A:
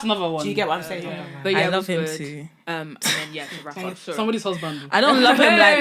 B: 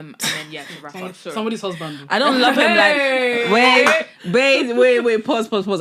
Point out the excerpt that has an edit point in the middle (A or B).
A